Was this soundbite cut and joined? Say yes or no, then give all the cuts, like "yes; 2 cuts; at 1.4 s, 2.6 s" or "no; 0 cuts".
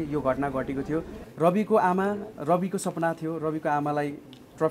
yes; 1 cut; at 1.2 s